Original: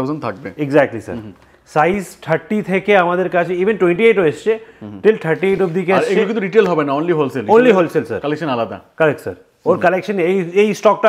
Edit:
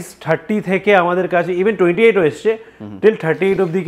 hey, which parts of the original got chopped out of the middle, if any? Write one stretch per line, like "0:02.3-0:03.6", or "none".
none